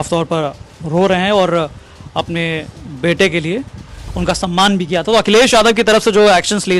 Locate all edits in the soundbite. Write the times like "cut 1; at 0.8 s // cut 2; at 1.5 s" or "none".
cut 1; at 4.0 s

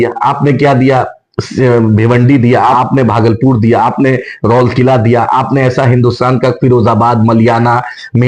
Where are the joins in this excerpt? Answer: cut 1; at 2.7 s

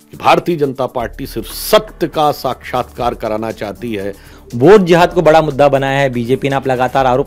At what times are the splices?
cut 1; at 4.4 s

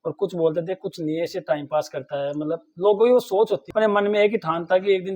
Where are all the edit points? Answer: cut 1; at 3.7 s

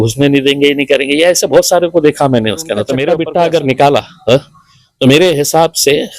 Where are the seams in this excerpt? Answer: cut 1; at 3.1 s

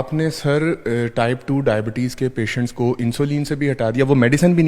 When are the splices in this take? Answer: none

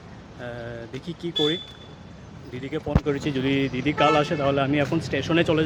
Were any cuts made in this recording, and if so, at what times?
none

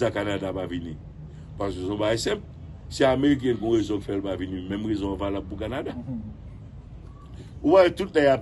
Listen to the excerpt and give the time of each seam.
none

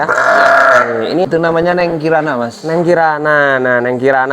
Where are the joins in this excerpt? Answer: cut 1; at 1.3 s

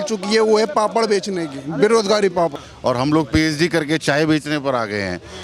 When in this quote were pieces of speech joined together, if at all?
cut 1; at 2.6 s

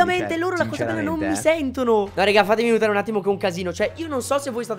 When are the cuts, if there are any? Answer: none

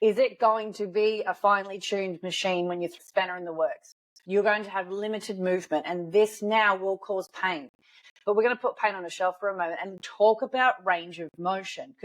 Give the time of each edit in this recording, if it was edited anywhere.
cut 1; at 2.9 s // cut 2; at 3.9 s // cut 3; at 8.0 s

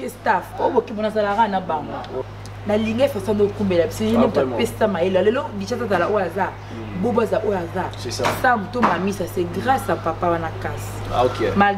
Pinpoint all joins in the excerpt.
cut 1; at 2.2 s

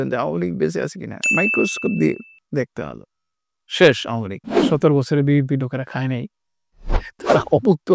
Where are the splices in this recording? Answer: cut 1; at 4.6 s

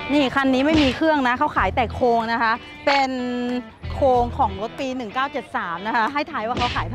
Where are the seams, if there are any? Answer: none

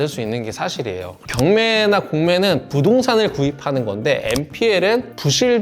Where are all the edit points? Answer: cut 1; at 1.2 s

